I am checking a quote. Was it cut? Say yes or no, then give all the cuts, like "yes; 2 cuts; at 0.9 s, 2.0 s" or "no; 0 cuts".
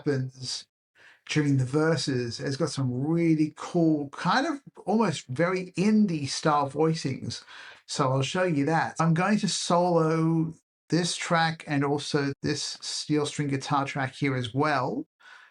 no; 0 cuts